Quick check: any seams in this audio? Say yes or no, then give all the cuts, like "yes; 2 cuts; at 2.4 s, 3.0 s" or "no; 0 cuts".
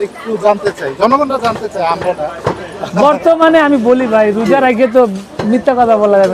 no; 0 cuts